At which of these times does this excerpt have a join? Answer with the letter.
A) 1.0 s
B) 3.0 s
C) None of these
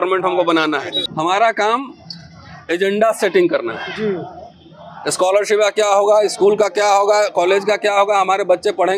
A